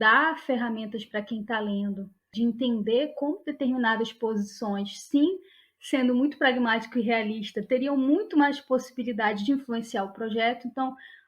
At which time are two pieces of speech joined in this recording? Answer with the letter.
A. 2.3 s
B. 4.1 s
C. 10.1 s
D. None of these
A